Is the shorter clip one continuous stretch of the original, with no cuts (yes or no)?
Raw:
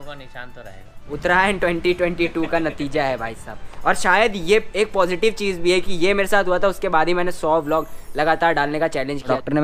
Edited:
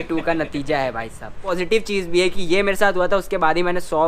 no